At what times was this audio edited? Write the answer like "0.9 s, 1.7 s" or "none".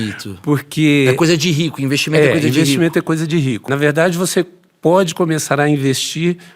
3.6 s